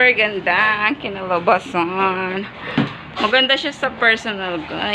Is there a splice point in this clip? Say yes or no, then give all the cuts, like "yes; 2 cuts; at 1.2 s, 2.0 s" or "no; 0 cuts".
no; 0 cuts